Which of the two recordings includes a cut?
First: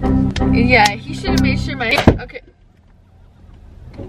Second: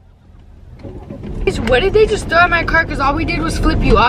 first; 1 cut; at 1.9 s

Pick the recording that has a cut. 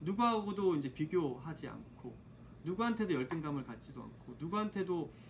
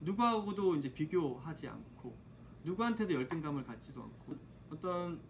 second; 1 cut; at 4.4 s

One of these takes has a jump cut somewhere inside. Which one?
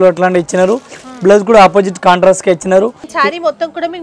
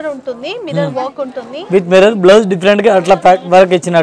first; 1 cut; at 3.0 s

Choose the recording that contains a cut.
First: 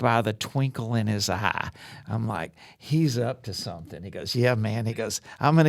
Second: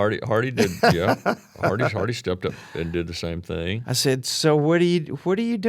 second; 1 cut; at 3.8 s

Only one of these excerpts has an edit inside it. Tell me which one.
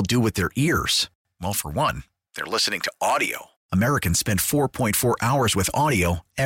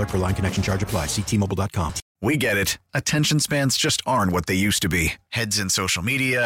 second; 1 cut; at 2.0 s

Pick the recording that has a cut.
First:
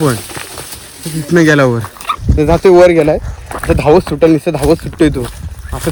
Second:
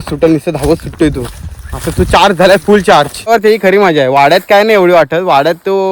second; 1 cut; at 3.3 s

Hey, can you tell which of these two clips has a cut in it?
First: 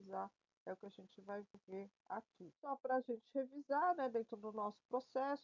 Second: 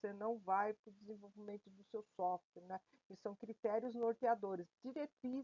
first; 1 cut; at 2.4 s

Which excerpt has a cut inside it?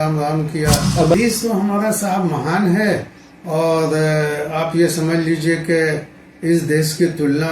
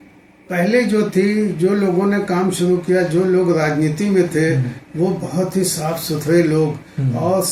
first; 1 cut; at 1.1 s

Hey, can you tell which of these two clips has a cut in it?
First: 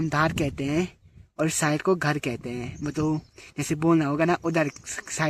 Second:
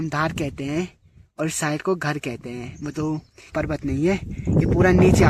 second; 1 cut; at 3.5 s

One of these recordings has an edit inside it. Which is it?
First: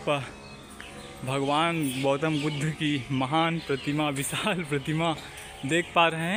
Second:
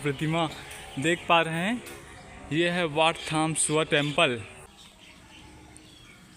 second; 1 cut; at 4.7 s

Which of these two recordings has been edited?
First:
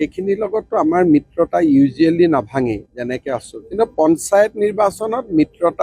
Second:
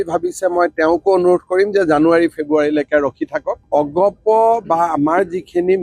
second; 1 cut; at 3.5 s

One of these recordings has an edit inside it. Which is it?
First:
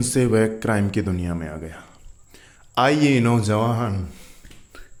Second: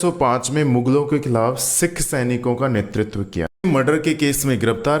second; 1 cut; at 3.6 s

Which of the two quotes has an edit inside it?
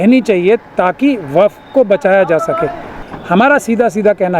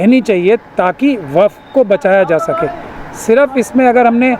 first; 1 cut; at 3.1 s

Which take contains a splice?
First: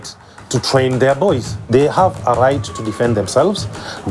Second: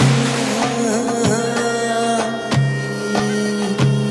first; 1 cut; at 1.6 s

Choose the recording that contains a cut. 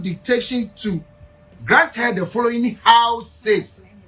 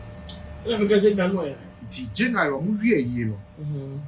first; 1 cut; at 1.5 s

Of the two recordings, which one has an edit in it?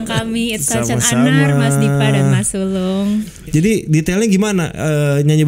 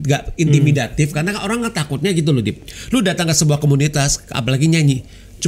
first; 1 cut; at 3.3 s

